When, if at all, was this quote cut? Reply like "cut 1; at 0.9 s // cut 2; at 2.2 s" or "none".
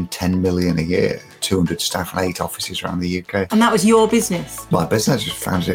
cut 1; at 1.3 s // cut 2; at 3.5 s // cut 3; at 4.5 s